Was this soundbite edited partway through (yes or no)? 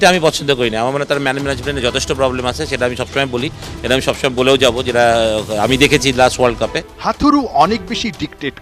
no